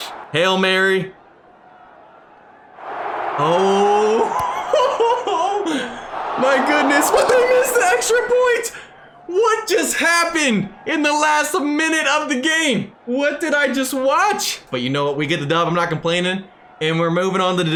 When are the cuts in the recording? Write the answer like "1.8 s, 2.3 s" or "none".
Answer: none